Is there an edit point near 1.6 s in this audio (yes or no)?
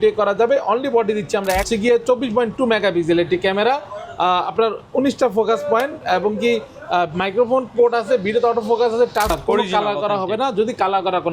yes